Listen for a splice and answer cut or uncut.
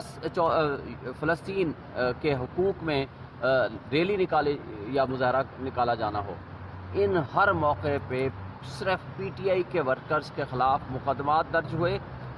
uncut